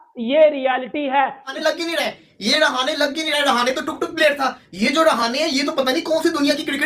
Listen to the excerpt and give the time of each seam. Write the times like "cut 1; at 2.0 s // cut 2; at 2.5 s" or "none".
cut 1; at 1.5 s